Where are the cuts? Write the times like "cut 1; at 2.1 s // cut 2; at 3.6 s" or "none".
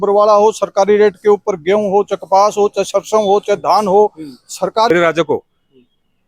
cut 1; at 4.9 s